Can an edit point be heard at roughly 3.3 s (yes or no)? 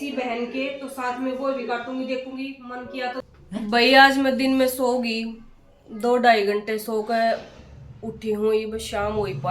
yes